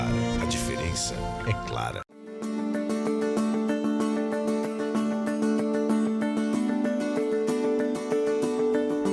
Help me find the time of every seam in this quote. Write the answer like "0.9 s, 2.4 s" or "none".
none